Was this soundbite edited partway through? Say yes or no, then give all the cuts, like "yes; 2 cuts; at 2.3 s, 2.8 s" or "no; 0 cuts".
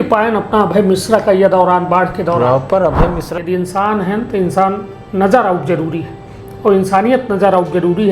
yes; 1 cut; at 3.3 s